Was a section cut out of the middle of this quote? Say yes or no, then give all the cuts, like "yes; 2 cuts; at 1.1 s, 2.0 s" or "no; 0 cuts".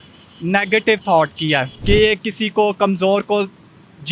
yes; 1 cut; at 1.7 s